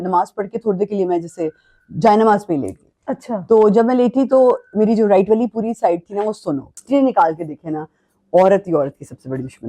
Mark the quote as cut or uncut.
cut